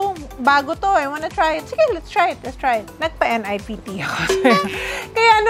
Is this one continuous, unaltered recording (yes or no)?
yes